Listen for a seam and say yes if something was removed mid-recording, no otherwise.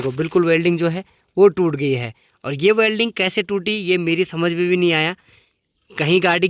no